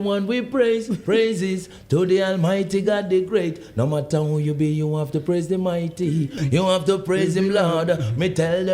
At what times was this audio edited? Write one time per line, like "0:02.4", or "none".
0:06.3

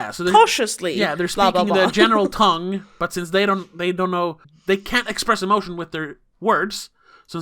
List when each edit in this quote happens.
0:04.5

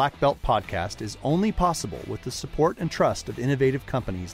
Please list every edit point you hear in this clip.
none

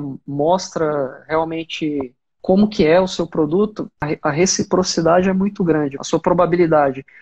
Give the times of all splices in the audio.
0:02.2
0:04.0
0:06.0

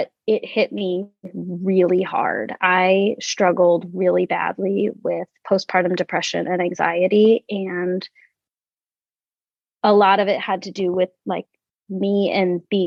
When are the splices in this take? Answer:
none

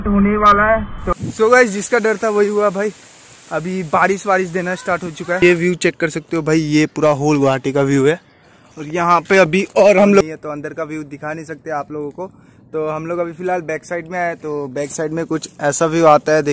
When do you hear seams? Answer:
0:01.1
0:05.4
0:10.2

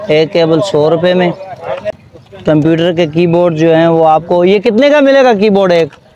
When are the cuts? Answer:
0:02.0

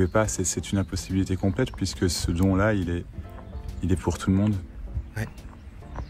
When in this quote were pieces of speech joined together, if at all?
none

